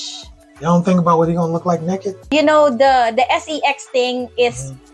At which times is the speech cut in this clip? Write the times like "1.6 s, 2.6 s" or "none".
2.1 s

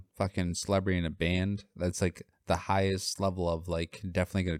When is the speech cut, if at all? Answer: none

